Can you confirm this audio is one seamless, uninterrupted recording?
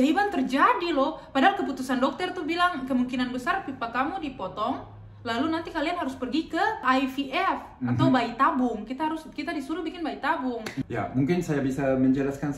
no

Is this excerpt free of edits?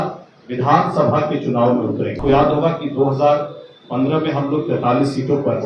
no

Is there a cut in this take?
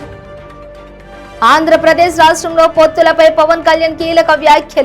yes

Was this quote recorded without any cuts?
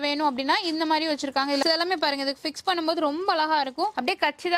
no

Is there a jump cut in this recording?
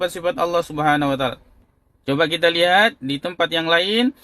no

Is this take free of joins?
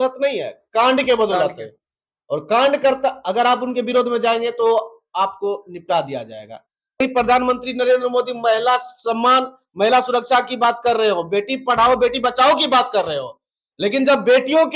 no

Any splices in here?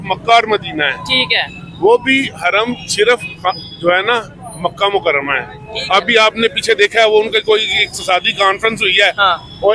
no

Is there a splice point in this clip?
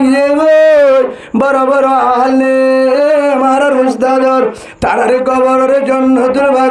no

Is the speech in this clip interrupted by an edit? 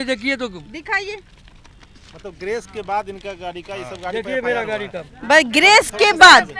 no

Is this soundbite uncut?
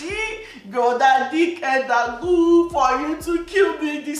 yes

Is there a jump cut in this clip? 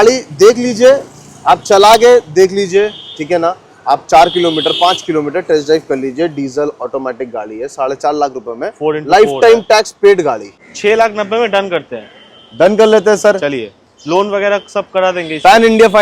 yes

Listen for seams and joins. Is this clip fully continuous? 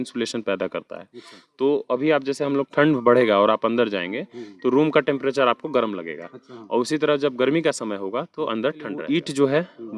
no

